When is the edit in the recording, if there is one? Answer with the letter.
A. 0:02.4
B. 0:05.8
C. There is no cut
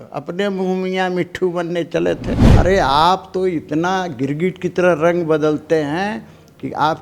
A